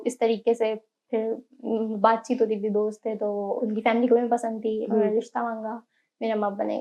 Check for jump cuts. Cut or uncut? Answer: uncut